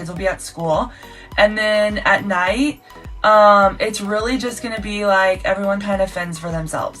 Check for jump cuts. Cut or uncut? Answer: uncut